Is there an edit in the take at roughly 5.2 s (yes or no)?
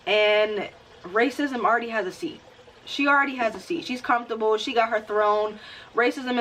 no